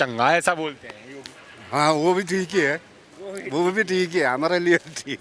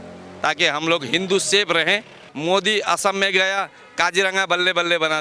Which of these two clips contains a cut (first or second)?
second